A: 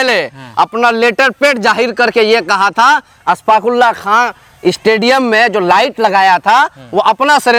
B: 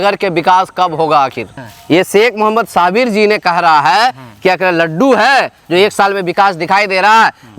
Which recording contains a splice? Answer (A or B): B